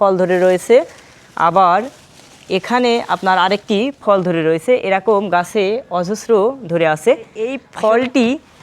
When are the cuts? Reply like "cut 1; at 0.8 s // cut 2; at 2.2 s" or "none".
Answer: cut 1; at 7.7 s